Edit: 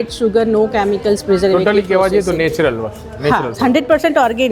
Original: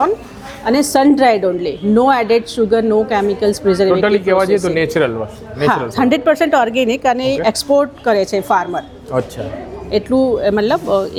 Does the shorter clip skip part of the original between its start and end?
no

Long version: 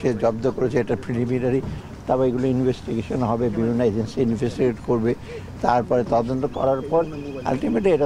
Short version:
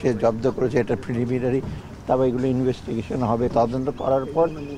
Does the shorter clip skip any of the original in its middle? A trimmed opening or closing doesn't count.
yes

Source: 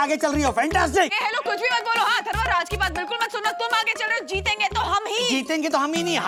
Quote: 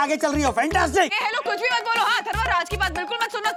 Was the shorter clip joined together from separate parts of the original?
no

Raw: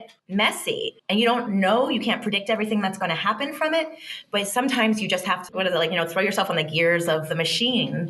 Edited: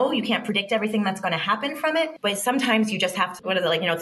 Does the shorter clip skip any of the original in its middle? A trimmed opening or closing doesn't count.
yes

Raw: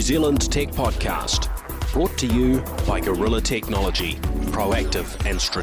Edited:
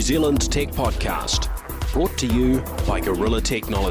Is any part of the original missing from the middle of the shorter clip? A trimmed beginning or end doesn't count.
no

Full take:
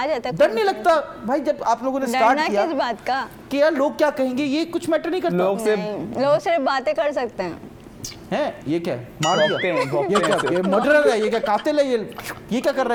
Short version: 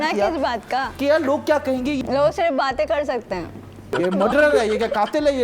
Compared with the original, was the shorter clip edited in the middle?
yes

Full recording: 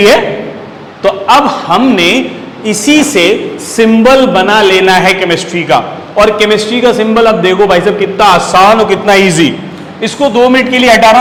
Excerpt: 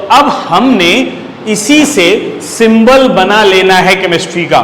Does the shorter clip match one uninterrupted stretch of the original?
yes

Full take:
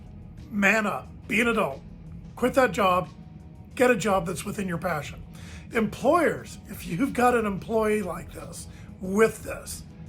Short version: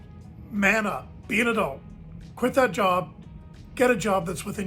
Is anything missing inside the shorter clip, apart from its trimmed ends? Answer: no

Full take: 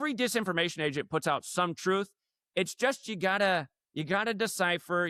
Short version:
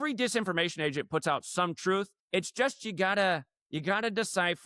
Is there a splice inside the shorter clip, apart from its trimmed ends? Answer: yes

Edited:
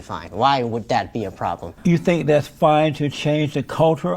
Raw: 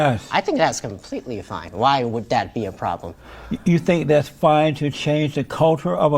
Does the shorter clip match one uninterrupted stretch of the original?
no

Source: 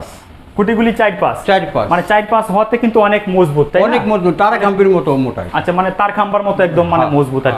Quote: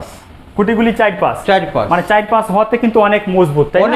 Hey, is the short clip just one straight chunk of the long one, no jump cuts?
yes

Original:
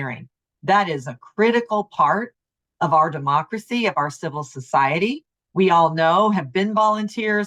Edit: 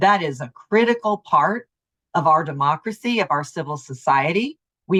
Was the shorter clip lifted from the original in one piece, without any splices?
yes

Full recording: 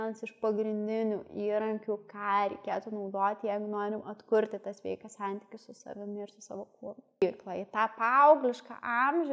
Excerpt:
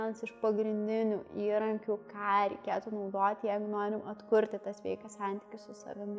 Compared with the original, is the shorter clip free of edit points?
yes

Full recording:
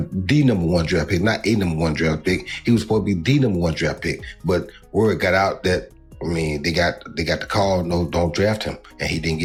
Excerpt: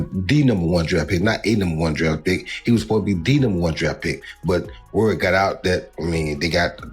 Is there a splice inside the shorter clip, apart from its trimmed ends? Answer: yes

